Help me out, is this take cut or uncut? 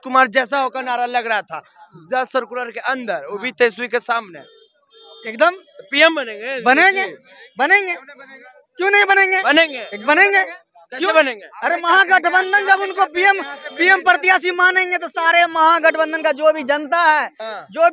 uncut